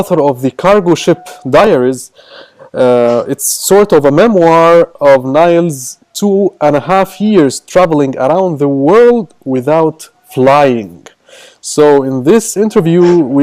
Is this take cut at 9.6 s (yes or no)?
no